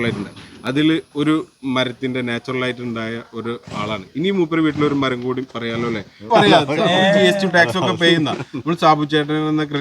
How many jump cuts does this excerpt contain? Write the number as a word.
one